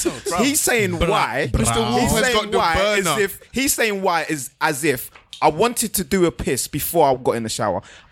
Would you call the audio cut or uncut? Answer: cut